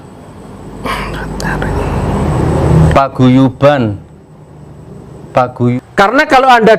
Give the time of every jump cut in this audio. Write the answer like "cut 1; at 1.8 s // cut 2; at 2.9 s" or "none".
cut 1; at 5.7 s

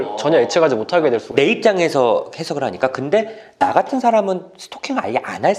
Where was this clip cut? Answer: none

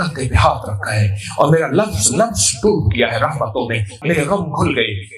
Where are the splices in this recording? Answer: cut 1; at 3.9 s

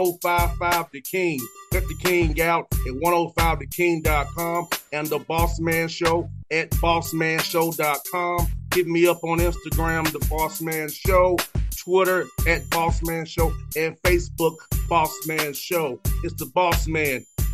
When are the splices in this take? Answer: none

